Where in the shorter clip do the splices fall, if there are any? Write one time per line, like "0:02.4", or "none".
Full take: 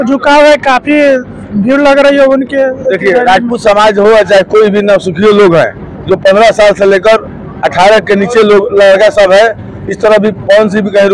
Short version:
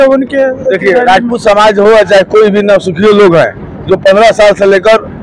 none